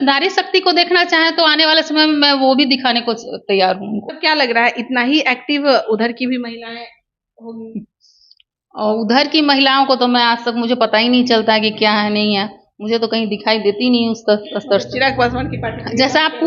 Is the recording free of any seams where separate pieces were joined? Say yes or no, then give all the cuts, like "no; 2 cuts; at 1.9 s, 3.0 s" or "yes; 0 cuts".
no; 1 cut; at 4.1 s